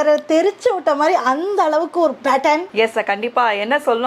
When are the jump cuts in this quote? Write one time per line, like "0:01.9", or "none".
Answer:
none